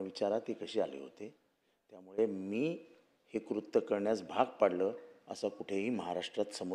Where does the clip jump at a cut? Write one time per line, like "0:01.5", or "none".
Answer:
none